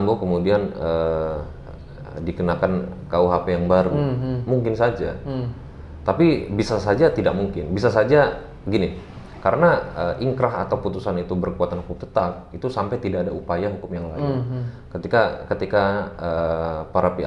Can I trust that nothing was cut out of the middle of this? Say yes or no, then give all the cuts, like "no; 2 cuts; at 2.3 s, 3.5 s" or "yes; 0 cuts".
yes; 0 cuts